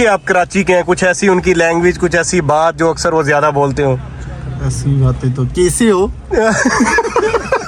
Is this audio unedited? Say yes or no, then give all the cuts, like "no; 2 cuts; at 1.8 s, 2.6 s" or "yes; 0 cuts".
yes; 0 cuts